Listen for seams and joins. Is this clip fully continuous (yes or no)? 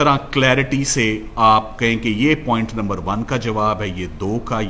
yes